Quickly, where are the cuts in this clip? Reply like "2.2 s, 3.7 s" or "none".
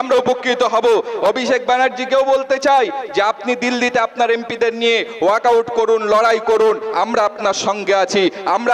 1.1 s